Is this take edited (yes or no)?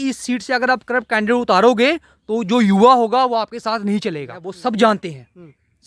yes